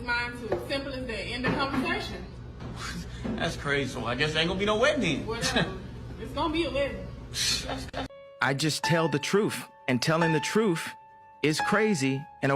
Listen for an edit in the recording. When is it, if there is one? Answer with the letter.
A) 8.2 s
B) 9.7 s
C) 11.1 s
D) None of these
A